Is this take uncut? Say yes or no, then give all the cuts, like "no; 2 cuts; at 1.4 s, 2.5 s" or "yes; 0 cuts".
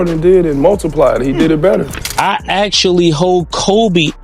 no; 1 cut; at 2.0 s